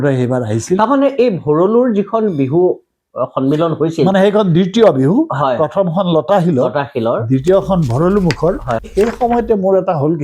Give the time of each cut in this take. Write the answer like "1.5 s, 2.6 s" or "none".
8.9 s